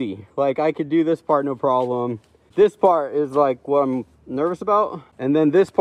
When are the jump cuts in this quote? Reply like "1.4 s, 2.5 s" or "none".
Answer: none